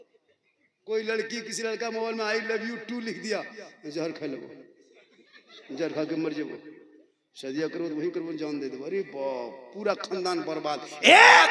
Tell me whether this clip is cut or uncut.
uncut